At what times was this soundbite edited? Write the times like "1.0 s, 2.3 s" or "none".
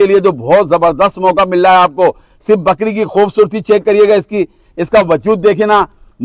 none